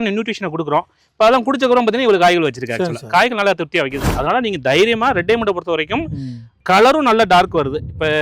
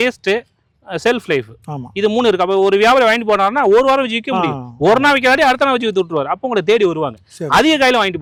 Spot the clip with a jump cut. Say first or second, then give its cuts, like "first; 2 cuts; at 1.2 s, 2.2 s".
first; 2 cuts; at 4.0 s, 6.6 s